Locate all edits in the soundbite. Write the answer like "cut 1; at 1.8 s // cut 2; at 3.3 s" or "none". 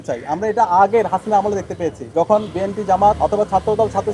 cut 1; at 2.0 s // cut 2; at 3.2 s